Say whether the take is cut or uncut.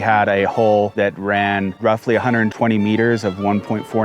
cut